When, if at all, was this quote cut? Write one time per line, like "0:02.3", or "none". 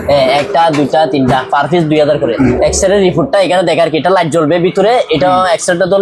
0:02.5